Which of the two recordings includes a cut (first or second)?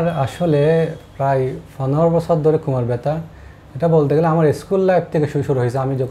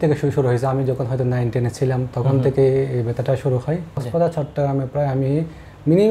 second